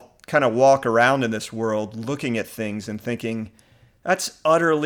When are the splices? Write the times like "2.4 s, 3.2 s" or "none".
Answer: none

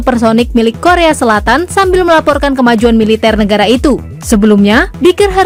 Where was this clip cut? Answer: none

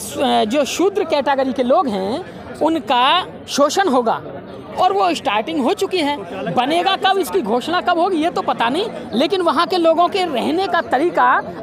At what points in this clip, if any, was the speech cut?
none

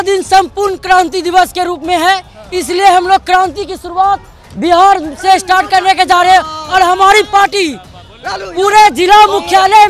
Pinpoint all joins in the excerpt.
none

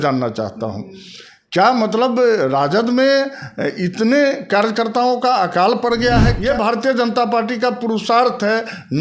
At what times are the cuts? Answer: 6.4 s

